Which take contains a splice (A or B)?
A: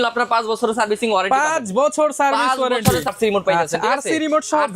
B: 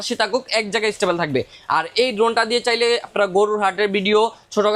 A